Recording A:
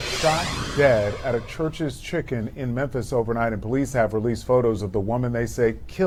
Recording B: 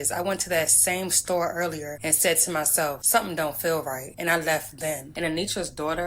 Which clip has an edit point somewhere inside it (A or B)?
B